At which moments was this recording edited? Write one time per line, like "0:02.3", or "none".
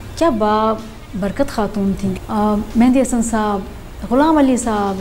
0:02.1

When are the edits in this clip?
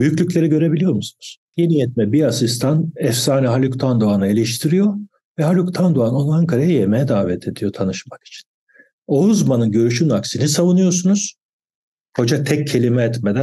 0:01.4

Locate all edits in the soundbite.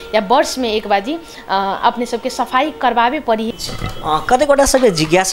0:03.5

